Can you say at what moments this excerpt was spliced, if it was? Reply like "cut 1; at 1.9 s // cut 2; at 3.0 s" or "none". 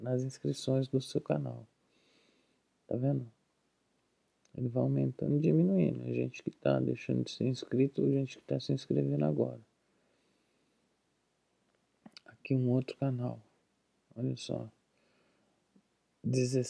none